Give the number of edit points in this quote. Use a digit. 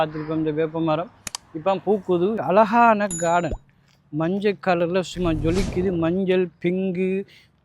1